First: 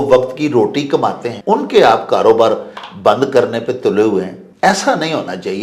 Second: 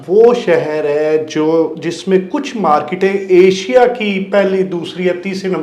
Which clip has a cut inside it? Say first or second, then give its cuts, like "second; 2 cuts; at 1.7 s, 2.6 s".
first; 2 cuts; at 1.3 s, 4.4 s